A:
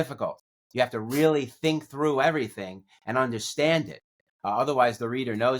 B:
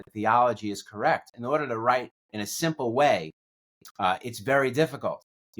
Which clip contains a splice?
B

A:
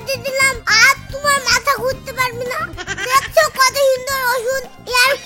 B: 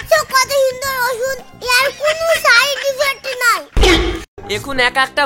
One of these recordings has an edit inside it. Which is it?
B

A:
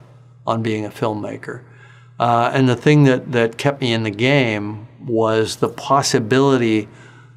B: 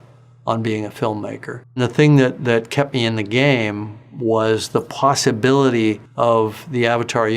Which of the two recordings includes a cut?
B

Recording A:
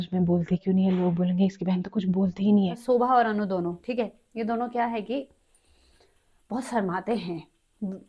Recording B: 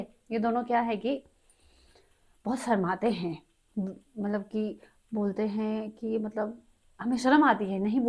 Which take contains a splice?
A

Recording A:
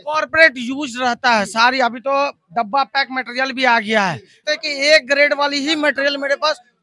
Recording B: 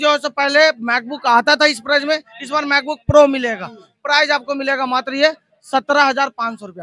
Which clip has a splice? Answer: A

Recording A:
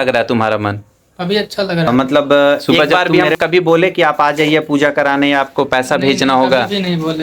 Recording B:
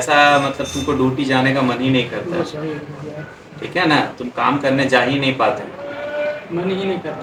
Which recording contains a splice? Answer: A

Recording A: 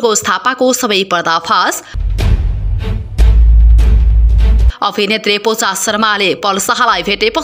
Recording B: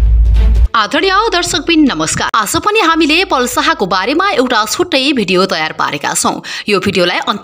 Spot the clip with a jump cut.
B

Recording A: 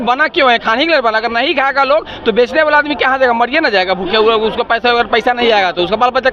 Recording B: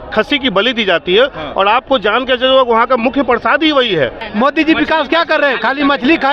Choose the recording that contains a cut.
B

